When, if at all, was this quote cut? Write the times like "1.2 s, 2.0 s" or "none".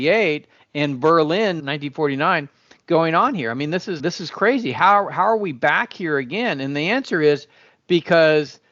1.6 s, 4.0 s